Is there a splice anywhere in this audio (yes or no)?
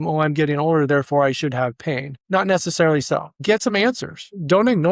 yes